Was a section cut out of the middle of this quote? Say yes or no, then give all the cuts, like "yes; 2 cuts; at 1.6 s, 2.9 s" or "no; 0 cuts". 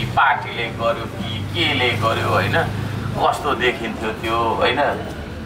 no; 0 cuts